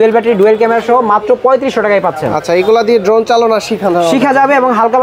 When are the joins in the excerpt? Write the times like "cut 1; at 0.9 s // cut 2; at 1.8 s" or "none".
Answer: none

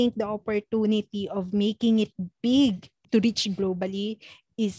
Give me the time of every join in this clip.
cut 1; at 2.9 s

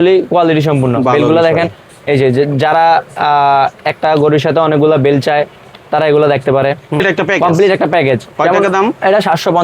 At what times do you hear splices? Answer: cut 1; at 7.0 s

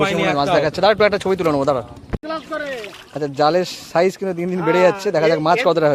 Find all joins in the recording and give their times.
cut 1; at 2.2 s

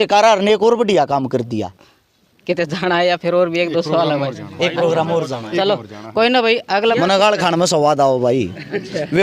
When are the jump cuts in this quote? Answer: cut 1; at 1.9 s // cut 2; at 7.0 s

